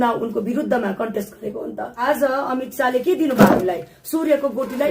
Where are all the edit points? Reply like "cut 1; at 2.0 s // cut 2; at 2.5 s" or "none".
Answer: cut 1; at 2.0 s